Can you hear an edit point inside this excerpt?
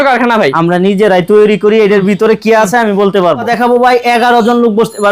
yes; 1 cut; at 3.5 s

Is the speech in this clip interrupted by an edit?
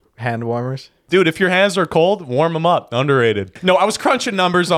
yes; 2 cuts; at 0.9 s, 3.5 s

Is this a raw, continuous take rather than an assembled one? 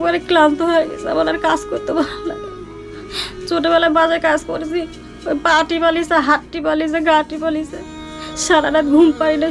yes; 0 cuts

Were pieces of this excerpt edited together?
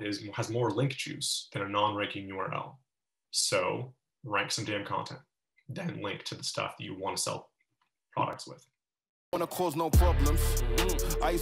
yes; 1 cut; at 9.4 s

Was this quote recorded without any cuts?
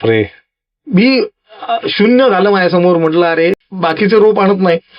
no; 1 cut; at 3.5 s

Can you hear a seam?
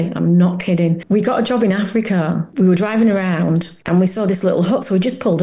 yes; 3 cuts; at 1.0 s, 2.5 s, 3.7 s

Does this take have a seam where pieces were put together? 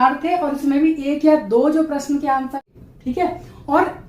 yes; 1 cut; at 2.6 s

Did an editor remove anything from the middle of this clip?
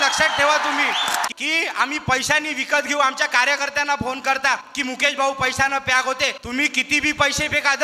yes; 3 cuts; at 1.3 s, 4.7 s, 6.4 s

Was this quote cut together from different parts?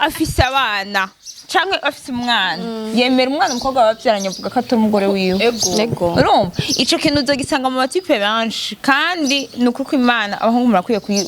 no; 0 cuts

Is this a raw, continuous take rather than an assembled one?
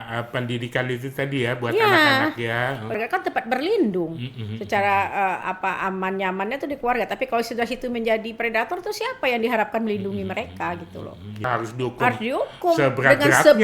no; 2 cuts; at 2.9 s, 11.4 s

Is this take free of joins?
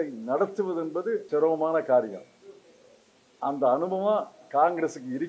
no; 1 cut; at 1.2 s

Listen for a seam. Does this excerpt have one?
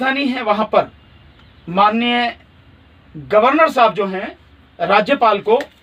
no; 0 cuts

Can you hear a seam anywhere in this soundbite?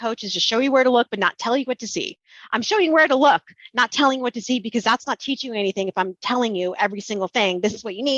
no; 0 cuts

